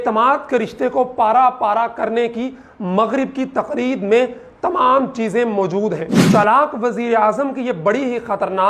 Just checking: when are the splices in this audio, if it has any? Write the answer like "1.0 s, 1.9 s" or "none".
6.2 s

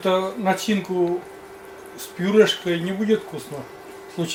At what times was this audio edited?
none

